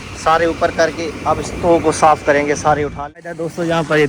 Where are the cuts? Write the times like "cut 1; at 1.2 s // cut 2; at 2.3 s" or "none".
cut 1; at 3.0 s